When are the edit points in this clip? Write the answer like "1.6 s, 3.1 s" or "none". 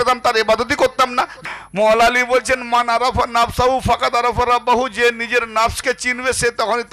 1.3 s